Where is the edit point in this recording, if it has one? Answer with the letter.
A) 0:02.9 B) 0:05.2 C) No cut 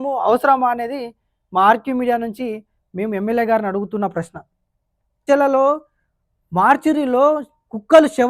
B